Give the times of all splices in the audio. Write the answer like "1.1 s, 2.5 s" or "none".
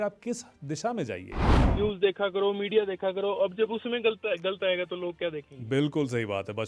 1.6 s